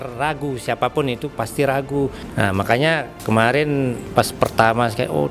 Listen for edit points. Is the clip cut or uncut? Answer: cut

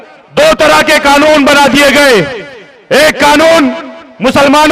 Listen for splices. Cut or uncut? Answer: uncut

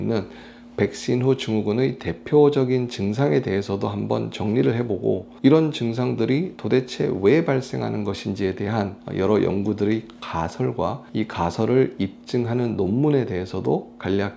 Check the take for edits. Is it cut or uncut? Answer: cut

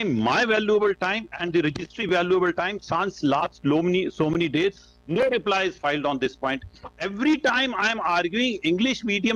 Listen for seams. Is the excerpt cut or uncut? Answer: uncut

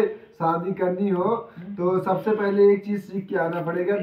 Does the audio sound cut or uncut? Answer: uncut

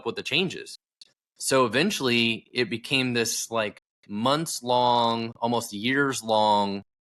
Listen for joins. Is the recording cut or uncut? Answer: uncut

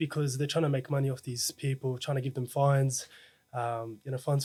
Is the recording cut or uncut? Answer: uncut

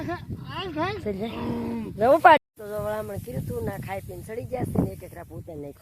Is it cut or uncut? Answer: cut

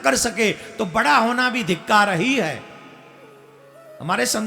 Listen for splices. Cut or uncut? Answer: uncut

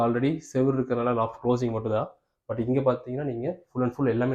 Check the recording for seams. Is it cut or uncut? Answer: uncut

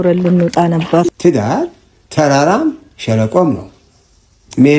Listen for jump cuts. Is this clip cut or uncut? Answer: cut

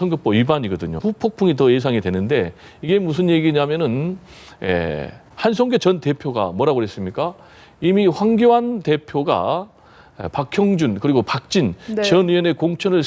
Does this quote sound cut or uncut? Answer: cut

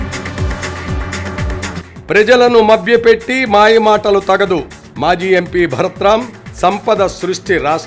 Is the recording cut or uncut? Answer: uncut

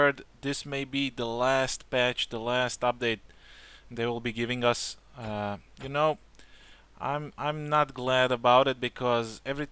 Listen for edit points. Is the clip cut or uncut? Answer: cut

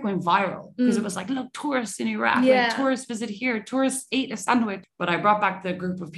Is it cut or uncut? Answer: cut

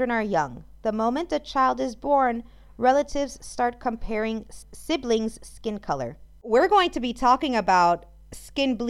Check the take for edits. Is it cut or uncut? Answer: cut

